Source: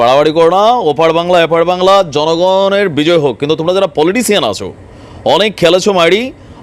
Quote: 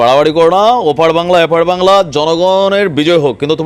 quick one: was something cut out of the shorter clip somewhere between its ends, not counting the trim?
no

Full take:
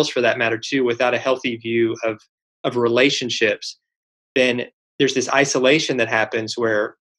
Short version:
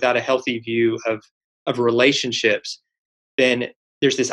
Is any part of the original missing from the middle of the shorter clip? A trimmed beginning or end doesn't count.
no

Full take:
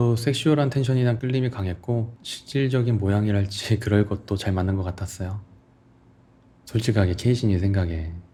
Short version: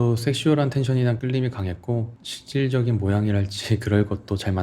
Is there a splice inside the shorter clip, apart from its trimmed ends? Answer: no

